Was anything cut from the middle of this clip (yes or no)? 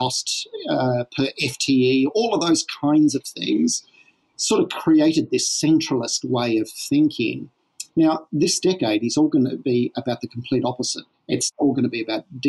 yes